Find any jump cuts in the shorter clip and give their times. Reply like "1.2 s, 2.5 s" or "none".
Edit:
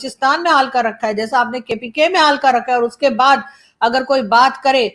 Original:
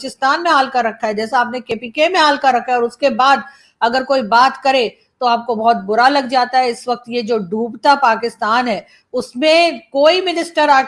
none